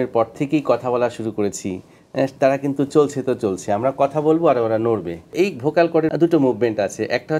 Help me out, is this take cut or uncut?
uncut